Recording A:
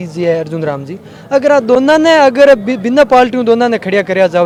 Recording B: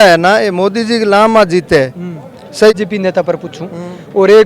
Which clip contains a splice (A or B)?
B